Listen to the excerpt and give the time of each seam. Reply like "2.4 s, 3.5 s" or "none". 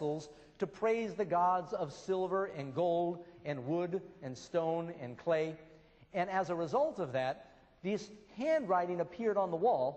5.6 s